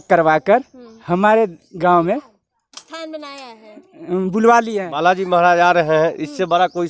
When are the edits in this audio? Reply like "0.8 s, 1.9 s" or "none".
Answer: 4.7 s